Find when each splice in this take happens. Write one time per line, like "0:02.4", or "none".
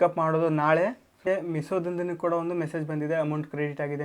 0:01.2